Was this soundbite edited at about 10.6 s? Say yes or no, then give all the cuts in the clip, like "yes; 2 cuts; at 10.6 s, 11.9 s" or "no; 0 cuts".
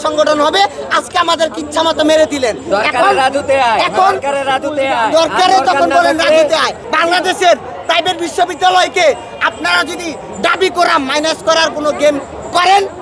no; 1 cut; at 6.8 s